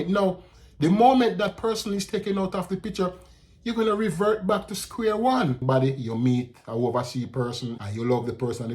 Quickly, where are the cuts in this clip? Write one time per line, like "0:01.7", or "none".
0:05.6
0:07.7